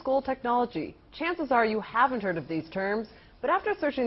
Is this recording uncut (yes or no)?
no